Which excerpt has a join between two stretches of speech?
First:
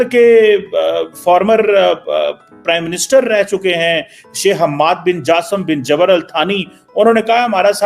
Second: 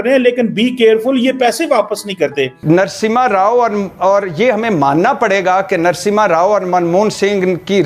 second; 1 cut; at 2.6 s

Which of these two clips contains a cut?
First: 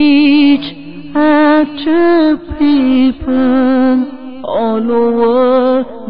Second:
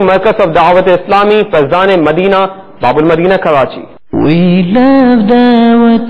second; 1 cut; at 4.0 s

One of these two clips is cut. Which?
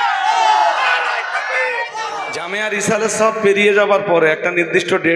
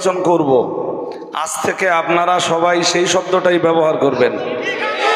first; 1 cut; at 2.4 s

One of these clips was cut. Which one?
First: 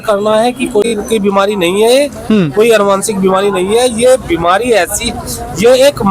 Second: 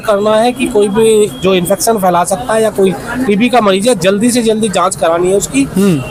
first; 1 cut; at 0.9 s

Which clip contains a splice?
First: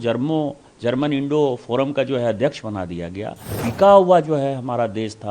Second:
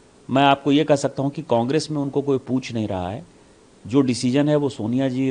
first; 1 cut; at 3.5 s

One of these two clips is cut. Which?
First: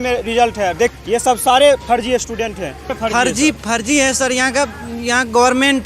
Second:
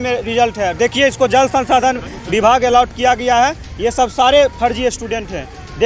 first; 2 cuts; at 0.9 s, 2.9 s

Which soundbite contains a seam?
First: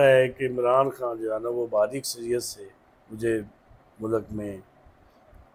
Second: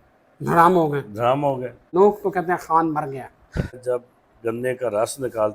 second; 2 cuts; at 1.9 s, 3.8 s

